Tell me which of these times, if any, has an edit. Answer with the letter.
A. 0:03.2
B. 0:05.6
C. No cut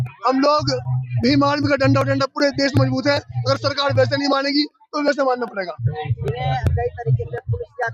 C